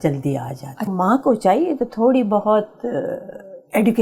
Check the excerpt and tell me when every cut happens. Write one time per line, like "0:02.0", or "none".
0:00.9